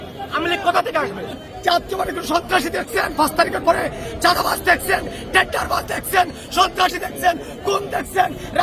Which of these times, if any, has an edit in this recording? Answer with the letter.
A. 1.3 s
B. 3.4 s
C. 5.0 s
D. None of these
A